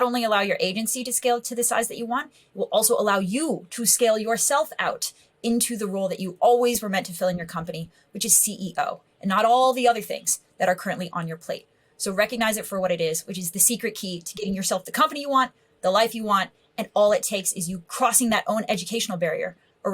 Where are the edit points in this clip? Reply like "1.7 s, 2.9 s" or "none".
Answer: 17.8 s